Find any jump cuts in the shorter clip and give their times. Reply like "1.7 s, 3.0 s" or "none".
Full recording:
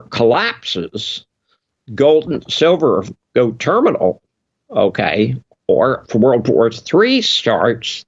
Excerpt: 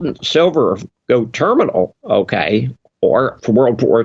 2.0 s